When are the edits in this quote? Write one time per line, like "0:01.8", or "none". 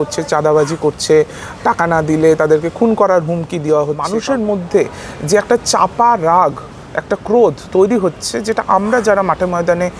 0:04.1